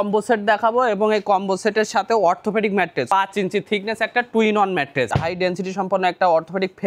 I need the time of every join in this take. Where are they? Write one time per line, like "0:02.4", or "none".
0:03.1
0:05.1